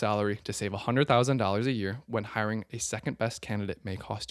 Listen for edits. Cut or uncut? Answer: uncut